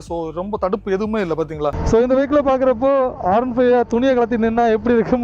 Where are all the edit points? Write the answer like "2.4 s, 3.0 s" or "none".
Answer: 1.8 s